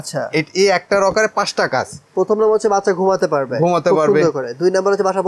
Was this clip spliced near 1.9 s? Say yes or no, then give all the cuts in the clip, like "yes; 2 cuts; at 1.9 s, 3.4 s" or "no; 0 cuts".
no; 0 cuts